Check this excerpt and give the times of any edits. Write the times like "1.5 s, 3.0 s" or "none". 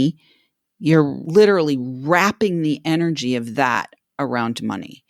1.3 s